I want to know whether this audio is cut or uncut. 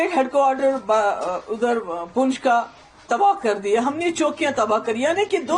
uncut